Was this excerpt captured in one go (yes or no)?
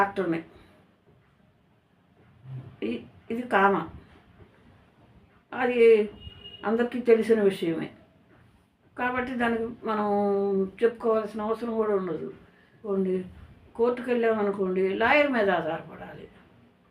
no